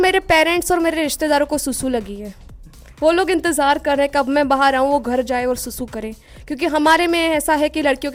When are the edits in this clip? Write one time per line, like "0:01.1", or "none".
none